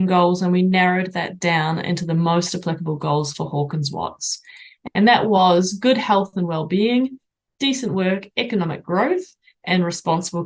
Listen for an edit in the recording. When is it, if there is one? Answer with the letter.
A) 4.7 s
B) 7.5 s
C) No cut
C